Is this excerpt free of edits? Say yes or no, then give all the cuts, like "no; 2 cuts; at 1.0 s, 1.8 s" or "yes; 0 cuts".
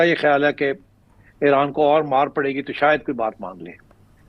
yes; 0 cuts